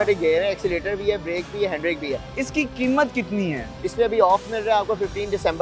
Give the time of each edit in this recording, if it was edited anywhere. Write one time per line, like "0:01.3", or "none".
0:02.3
0:03.7